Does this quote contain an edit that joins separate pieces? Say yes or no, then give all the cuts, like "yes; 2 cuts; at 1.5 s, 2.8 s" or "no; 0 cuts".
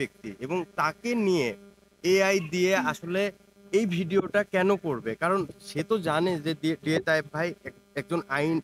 no; 0 cuts